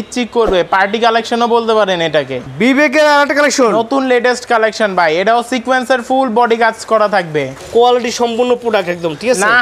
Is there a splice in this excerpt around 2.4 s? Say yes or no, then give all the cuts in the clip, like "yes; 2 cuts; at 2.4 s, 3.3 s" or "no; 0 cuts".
yes; 2 cuts; at 2.4 s, 7.6 s